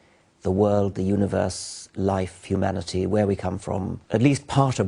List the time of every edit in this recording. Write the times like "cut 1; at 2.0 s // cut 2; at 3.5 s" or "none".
cut 1; at 4.0 s